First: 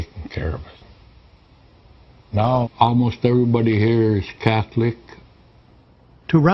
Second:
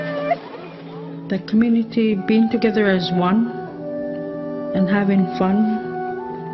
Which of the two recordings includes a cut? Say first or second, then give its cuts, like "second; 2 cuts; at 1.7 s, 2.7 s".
second; 1 cut; at 1.6 s